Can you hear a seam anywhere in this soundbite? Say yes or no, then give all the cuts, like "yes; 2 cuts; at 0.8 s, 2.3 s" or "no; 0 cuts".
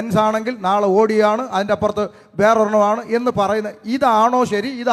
no; 0 cuts